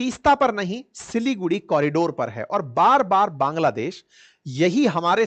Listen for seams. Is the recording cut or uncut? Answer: uncut